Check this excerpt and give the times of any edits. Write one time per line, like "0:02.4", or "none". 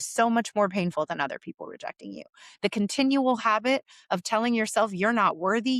none